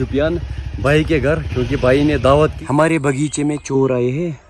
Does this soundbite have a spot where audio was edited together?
yes; 1 cut; at 2.6 s

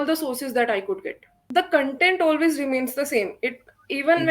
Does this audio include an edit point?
yes; 1 cut; at 1.4 s

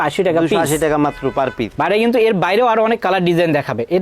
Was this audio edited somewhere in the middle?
yes; 1 cut; at 1.7 s

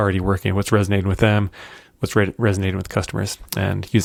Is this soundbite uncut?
yes; 0 cuts

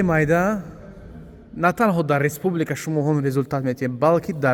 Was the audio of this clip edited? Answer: no; 0 cuts

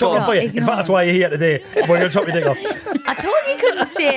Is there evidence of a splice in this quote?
yes; 2 cuts; at 1.7 s, 3.0 s

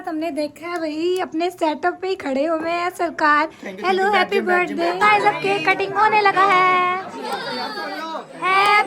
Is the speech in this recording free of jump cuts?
no; 1 cut; at 5.0 s

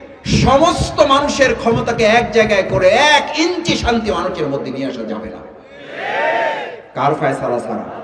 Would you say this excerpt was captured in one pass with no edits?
yes; 0 cuts

